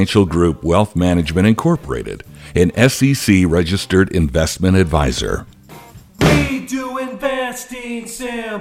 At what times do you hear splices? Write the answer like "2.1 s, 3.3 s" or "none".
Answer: 6.0 s